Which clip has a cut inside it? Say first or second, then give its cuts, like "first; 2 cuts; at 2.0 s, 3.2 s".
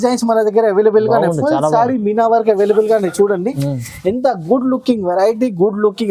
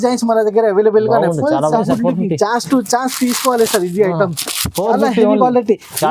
second; 1 cut; at 1.8 s